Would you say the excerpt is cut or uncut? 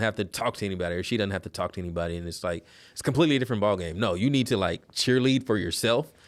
uncut